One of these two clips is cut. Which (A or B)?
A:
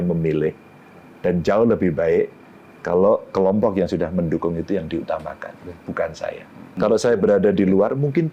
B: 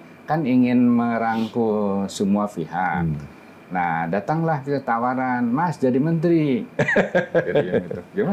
A